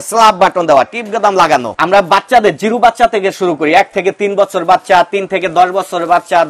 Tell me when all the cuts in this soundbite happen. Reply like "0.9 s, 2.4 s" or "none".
none